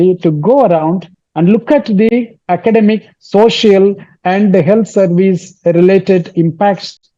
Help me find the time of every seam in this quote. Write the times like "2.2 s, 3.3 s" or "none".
none